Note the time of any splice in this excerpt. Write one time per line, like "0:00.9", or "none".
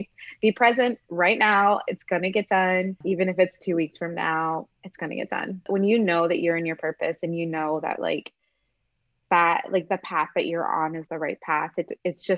0:03.0
0:05.5